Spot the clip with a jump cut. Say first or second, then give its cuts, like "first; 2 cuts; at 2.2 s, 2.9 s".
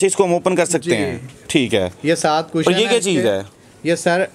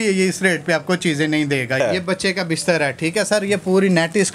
second; 1 cut; at 1.8 s